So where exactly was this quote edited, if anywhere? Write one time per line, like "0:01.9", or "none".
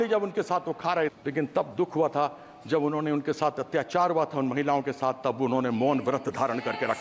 0:01.2